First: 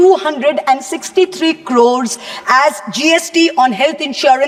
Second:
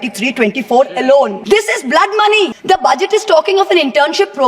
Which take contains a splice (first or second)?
second